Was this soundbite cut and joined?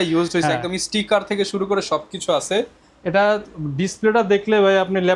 no; 0 cuts

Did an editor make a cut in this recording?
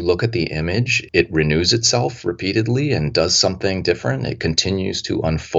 yes; 1 cut; at 1.0 s

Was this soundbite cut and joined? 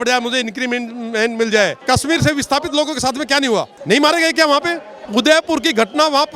yes; 3 cuts; at 1.8 s, 3.7 s, 5.0 s

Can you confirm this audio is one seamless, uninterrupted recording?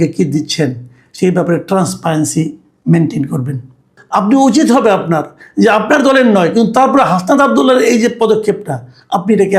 no; 1 cut; at 4.0 s

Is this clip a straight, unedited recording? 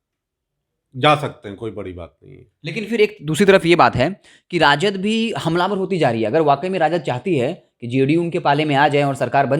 yes; 0 cuts

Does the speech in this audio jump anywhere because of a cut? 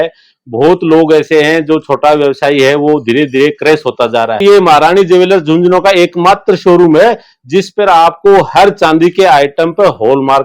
yes; 1 cut; at 4.4 s

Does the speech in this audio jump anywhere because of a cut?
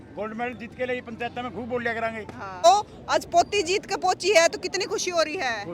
yes; 1 cut; at 2.6 s

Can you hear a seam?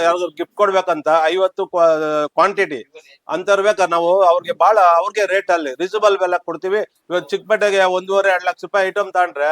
yes; 1 cut; at 6.9 s

